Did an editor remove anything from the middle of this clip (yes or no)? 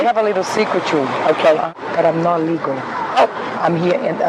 yes